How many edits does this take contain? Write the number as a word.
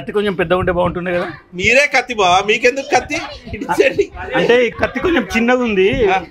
one